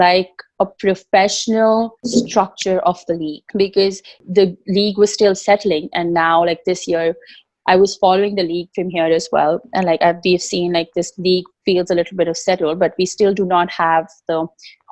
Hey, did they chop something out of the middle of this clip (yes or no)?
no